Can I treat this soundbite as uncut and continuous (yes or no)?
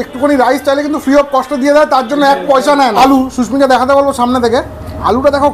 yes